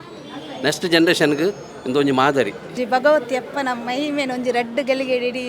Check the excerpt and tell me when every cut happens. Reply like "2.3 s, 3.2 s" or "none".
2.7 s